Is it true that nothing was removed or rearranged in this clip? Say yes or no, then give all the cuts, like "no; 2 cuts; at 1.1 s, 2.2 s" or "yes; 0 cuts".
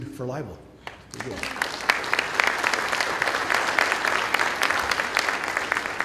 yes; 0 cuts